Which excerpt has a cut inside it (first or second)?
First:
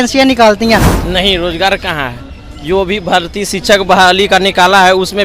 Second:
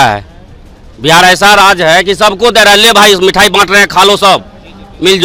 first